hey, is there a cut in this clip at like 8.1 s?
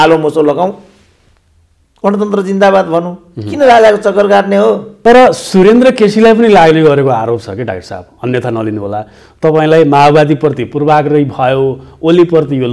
no; 1 cut; at 4.9 s

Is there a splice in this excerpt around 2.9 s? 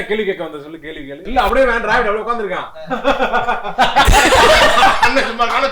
no; 1 cut; at 1.3 s

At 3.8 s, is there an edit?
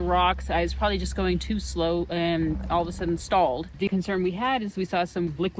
yes; 1 cut; at 3.8 s

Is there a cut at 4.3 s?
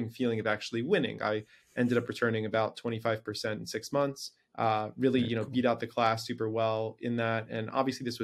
no; 0 cuts

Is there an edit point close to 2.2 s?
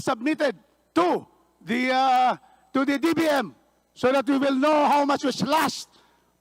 no; 0 cuts

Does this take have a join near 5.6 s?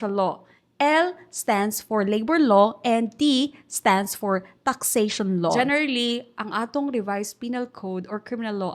yes; 1 cut; at 5.6 s

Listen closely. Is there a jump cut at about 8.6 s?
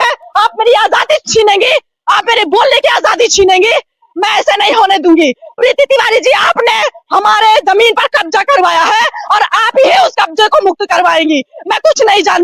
no; 0 cuts

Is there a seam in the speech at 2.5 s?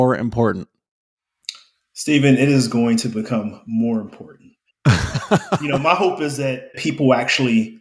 no; 1 cut; at 6.8 s

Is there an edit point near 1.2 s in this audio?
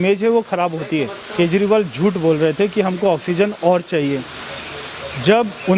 yes; 1 cut; at 1.2 s

